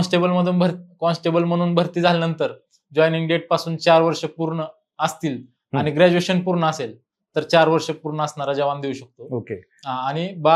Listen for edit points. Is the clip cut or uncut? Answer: uncut